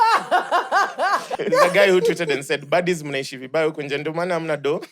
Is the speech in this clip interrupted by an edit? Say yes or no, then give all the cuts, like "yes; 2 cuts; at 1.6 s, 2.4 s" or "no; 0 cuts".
yes; 1 cut; at 1.4 s